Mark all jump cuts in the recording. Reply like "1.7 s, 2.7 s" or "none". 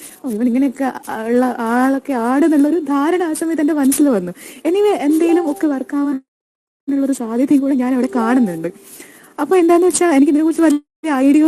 none